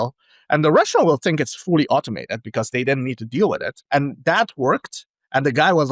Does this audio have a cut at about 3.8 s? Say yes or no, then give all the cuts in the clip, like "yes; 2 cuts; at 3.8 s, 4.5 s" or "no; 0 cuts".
yes; 1 cut; at 3.8 s